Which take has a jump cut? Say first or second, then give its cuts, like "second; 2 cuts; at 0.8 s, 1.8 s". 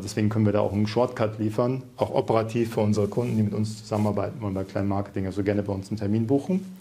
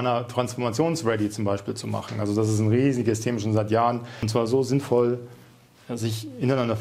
second; 1 cut; at 4.2 s